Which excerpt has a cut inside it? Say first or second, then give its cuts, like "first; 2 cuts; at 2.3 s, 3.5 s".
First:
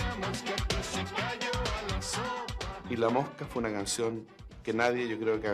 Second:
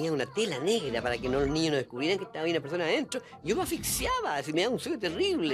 first; 1 cut; at 2.7 s